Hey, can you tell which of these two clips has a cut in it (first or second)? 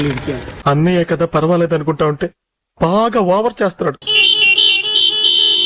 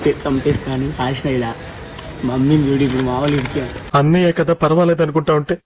first